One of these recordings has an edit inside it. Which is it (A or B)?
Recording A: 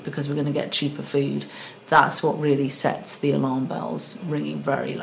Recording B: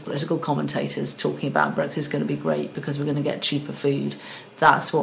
A